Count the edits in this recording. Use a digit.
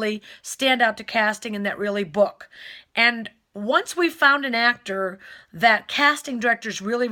0